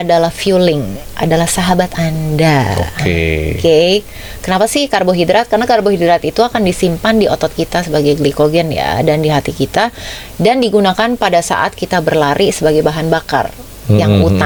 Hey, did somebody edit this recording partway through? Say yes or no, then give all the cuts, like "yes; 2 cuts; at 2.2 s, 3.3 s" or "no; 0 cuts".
no; 0 cuts